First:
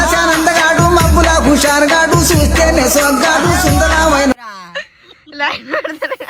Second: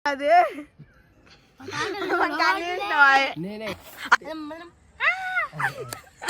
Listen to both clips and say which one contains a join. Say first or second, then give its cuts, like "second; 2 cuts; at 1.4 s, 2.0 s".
second; 1 cut; at 3.8 s